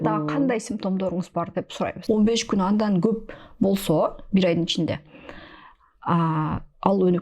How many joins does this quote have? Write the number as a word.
one